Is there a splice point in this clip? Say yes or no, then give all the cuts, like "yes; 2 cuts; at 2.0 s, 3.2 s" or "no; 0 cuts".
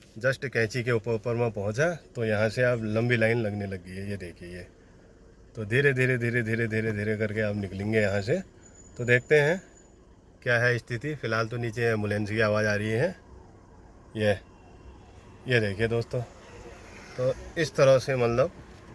no; 0 cuts